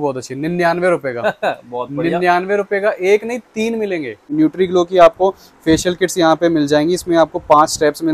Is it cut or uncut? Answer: cut